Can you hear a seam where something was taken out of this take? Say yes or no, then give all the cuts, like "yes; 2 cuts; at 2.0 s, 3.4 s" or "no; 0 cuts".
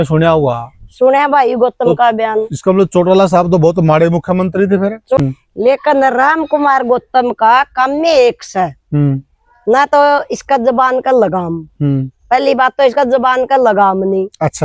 yes; 1 cut; at 5.2 s